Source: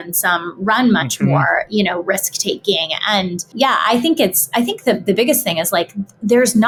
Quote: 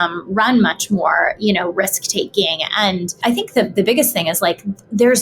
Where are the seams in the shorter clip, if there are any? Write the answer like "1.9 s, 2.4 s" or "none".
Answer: 3.1 s